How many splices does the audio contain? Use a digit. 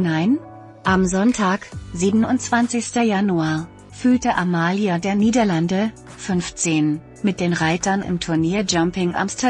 0